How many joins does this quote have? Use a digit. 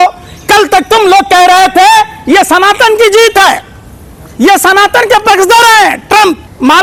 0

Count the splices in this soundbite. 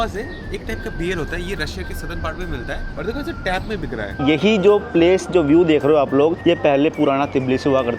3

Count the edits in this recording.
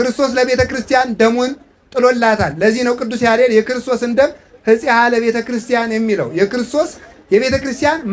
0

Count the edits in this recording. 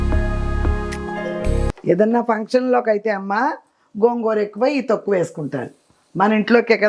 1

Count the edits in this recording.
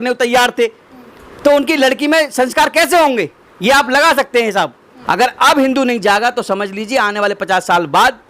1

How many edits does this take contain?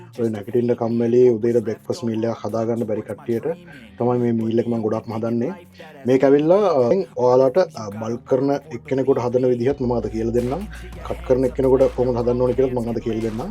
0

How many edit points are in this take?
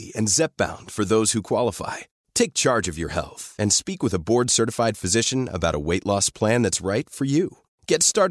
0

